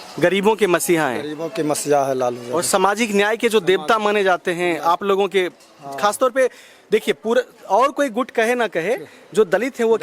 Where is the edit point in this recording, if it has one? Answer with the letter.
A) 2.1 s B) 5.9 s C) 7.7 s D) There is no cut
D